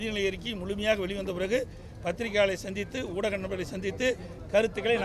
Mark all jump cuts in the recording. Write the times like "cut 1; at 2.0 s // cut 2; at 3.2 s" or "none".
none